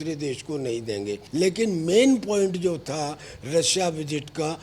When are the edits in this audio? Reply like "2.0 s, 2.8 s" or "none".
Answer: 1.2 s